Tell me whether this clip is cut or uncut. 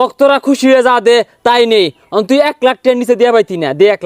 uncut